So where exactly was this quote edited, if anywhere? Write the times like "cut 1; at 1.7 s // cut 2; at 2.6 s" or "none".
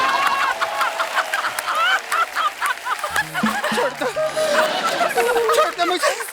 cut 1; at 3.6 s